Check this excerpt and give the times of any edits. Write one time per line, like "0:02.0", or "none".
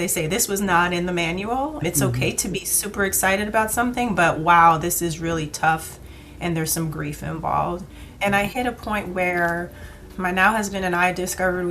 0:01.8
0:08.0

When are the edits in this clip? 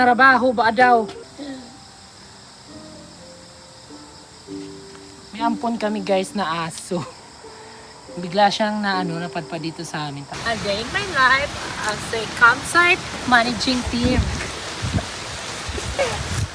0:10.3
0:13.1
0:14.5

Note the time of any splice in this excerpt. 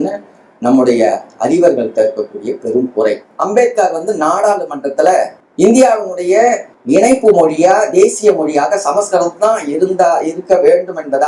0:03.3
0:05.4
0:06.7

